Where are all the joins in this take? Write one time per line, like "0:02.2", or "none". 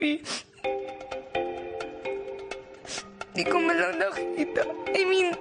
0:02.1